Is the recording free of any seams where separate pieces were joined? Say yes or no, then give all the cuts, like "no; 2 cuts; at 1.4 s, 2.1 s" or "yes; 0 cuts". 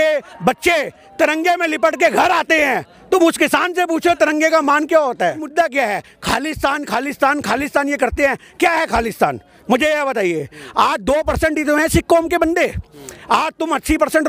no; 1 cut; at 5.4 s